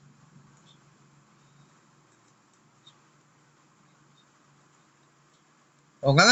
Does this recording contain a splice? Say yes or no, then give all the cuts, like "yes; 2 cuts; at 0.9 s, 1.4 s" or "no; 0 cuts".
no; 0 cuts